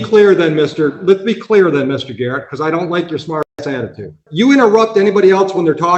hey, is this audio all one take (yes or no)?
no